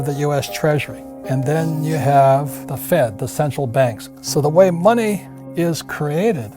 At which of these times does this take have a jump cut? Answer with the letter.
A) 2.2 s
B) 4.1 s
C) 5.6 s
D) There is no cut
B